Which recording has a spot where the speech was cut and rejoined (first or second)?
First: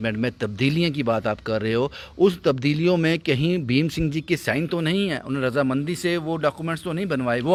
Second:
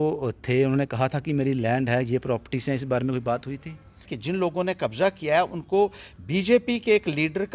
second